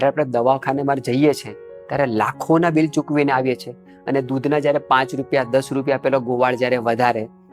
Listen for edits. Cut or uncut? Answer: uncut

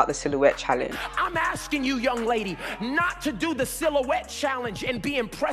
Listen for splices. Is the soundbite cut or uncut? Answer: cut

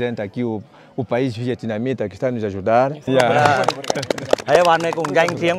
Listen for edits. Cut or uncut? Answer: cut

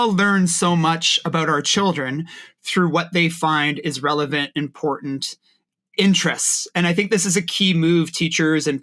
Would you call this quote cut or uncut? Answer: uncut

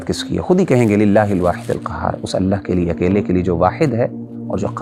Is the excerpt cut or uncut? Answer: uncut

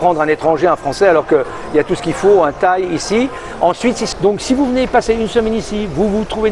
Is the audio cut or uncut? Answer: cut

